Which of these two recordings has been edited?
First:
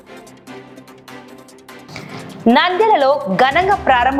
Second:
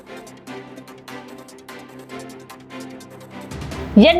second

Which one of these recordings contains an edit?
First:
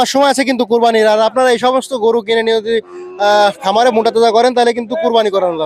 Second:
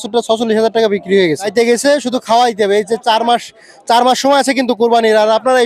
second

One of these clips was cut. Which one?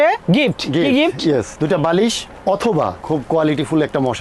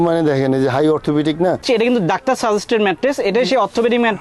second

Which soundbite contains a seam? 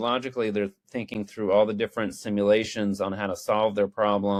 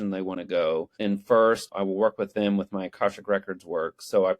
second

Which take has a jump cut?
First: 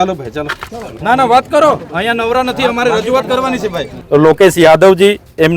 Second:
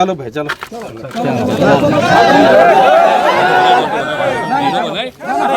first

